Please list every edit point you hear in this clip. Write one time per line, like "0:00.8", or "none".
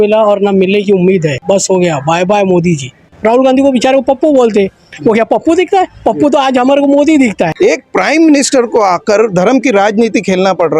0:01.3
0:03.0
0:07.5